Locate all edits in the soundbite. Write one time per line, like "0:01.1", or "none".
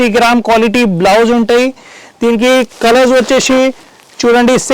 none